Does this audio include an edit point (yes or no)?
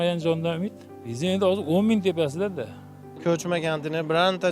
yes